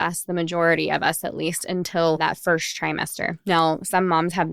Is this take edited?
yes; 1 cut; at 2.2 s

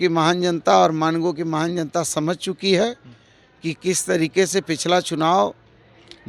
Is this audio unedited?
yes; 0 cuts

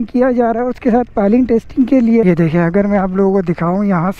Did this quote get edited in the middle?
yes; 1 cut; at 2.2 s

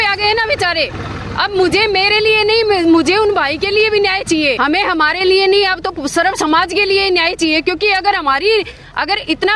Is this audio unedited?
no; 1 cut; at 4.6 s

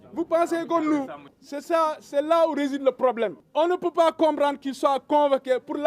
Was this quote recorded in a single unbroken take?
no; 2 cuts; at 1.2 s, 3.4 s

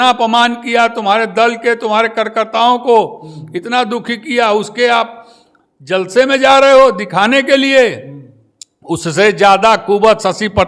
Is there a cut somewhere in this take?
no; 0 cuts

